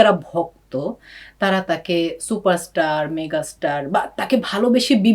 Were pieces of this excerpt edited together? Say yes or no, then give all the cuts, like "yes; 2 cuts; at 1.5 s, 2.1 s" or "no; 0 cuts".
no; 0 cuts